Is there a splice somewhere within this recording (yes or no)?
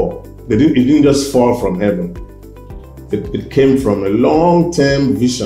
no